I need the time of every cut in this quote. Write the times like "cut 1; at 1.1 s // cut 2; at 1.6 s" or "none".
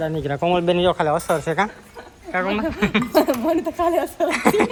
none